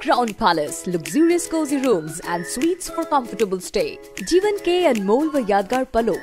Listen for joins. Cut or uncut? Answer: uncut